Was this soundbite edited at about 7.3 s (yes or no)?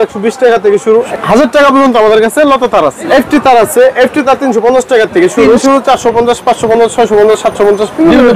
no